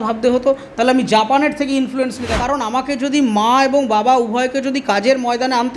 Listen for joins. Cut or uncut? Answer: cut